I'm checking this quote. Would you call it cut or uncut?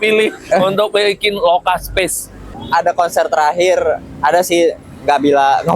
cut